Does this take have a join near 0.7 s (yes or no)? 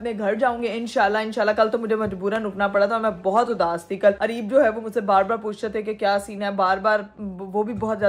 no